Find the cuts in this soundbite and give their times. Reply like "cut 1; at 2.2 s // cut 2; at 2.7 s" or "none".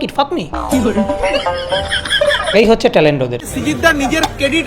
cut 1; at 2.5 s // cut 2; at 3.4 s